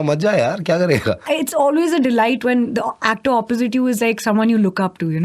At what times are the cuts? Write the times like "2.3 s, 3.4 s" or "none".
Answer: 1.2 s